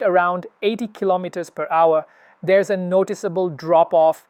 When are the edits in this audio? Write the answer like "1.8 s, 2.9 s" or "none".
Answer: none